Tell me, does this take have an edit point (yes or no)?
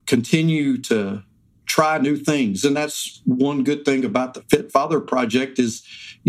no